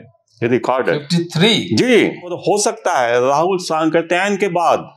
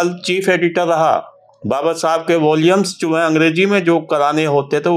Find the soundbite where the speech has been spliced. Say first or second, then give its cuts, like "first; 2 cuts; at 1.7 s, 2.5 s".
first; 1 cut; at 2.4 s